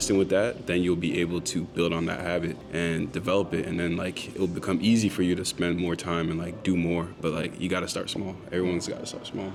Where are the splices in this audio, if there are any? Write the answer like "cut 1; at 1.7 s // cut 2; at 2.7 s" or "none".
none